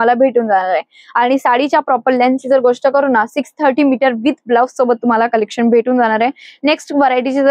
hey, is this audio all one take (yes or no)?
yes